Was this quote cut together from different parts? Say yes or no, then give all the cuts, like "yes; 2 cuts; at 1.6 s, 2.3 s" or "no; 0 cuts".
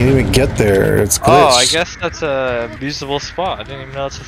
yes; 1 cut; at 2.8 s